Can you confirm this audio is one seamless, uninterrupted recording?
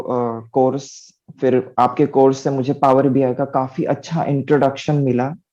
yes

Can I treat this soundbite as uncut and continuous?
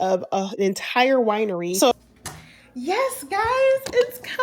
no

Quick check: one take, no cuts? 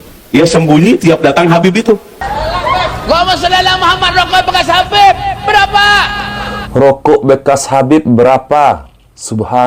no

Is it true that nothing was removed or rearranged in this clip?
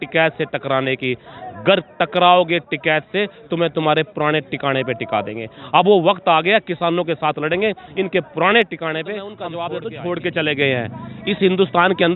no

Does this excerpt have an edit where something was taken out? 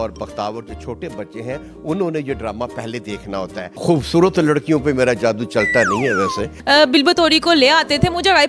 yes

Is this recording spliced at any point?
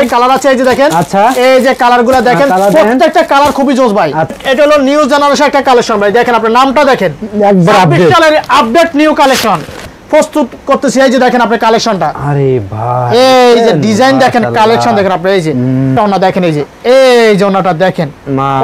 yes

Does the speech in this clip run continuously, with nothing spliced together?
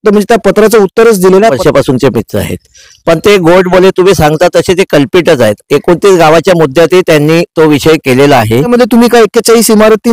no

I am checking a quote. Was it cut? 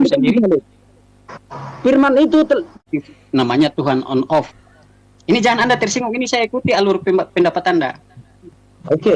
yes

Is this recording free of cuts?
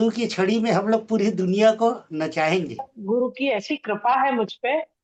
no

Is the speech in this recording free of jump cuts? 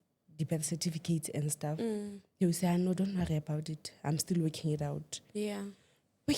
yes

